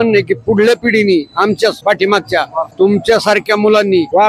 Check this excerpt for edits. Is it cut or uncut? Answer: uncut